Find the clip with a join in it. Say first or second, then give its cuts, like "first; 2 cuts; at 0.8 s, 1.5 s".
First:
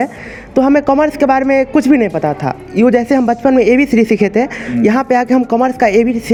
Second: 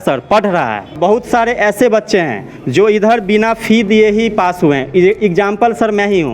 second; 1 cut; at 1.0 s